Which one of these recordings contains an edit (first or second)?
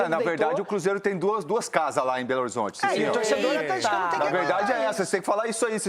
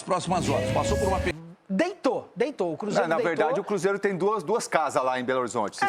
second